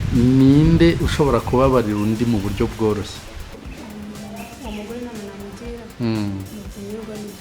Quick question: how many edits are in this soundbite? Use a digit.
1